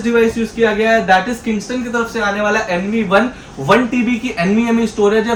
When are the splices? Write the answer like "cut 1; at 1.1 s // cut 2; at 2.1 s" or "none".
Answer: none